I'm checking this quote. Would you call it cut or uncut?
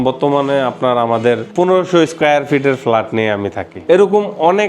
cut